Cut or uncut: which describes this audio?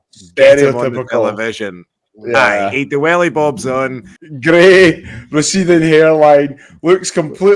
cut